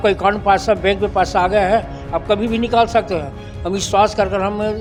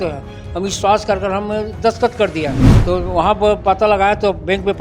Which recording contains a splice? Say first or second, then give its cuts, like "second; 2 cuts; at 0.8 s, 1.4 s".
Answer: second; 1 cut; at 2.7 s